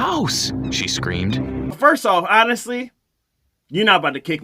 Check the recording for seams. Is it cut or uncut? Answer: cut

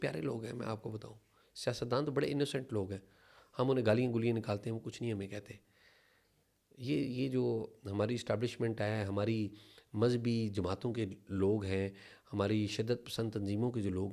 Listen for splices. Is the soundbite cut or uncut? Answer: uncut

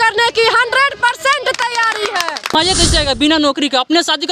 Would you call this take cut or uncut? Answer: cut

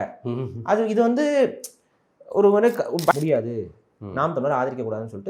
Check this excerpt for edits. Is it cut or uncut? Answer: cut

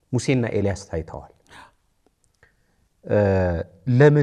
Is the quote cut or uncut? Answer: uncut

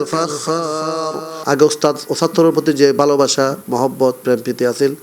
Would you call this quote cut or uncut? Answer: cut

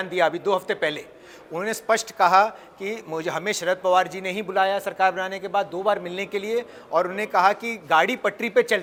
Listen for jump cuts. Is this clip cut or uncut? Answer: uncut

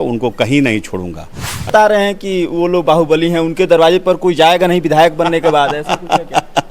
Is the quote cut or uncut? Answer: cut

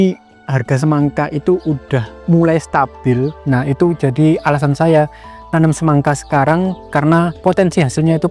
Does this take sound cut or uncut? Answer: cut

